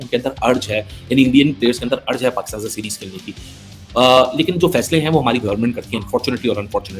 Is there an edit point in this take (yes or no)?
no